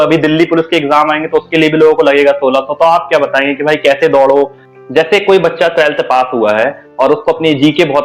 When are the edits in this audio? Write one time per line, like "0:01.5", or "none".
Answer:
0:04.6